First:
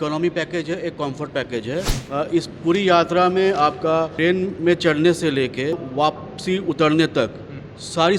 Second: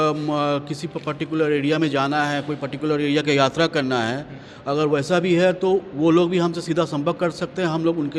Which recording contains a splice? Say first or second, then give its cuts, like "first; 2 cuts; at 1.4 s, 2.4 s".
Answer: first; 3 cuts; at 2.0 s, 4.1 s, 5.8 s